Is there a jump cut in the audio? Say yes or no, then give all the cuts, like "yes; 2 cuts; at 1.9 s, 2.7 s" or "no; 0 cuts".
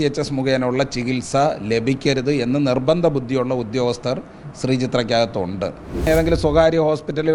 yes; 1 cut; at 6.0 s